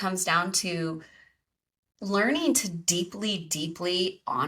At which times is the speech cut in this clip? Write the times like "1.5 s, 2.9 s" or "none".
none